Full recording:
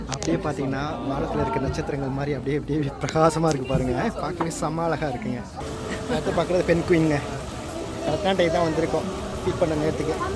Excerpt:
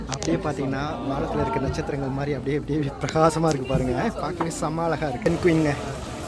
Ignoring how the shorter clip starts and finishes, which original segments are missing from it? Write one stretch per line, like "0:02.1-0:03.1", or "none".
0:05.3-0:06.7